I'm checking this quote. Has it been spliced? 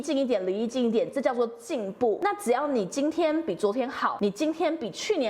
yes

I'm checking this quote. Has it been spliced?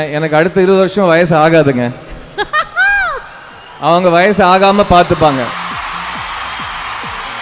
yes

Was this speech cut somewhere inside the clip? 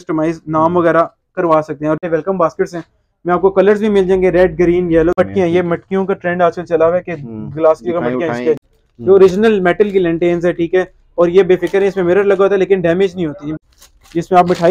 yes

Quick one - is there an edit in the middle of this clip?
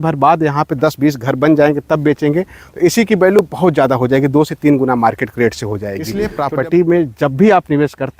yes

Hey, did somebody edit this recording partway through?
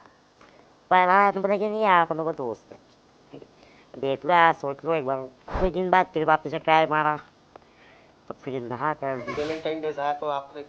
yes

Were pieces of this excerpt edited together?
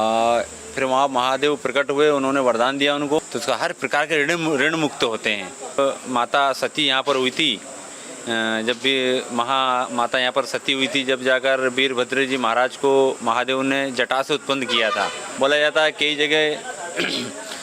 yes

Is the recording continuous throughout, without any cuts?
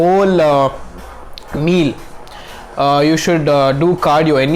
yes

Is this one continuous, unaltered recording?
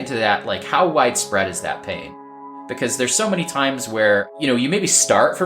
no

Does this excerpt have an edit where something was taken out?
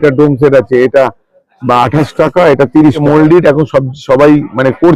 yes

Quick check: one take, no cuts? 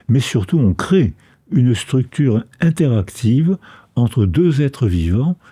yes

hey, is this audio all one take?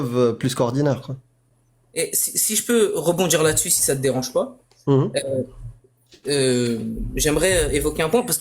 yes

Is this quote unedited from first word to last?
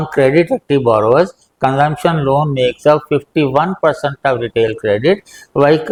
yes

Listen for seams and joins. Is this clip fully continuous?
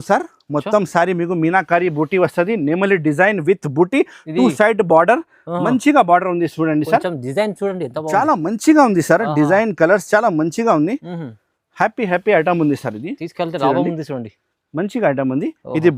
yes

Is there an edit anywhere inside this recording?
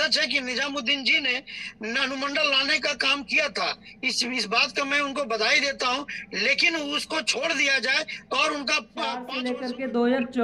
yes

